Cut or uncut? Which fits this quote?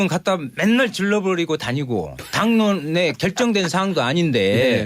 cut